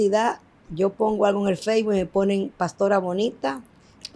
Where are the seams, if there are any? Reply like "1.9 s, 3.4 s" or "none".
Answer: none